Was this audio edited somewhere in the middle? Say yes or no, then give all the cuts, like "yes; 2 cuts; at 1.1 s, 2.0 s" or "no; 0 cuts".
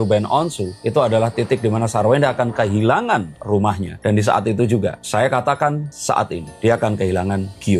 no; 0 cuts